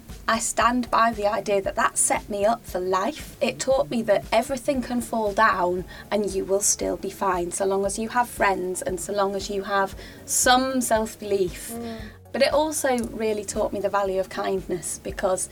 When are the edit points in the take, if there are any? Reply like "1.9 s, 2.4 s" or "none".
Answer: 3.3 s